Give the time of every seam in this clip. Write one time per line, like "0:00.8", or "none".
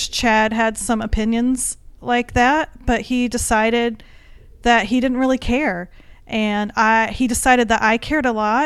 none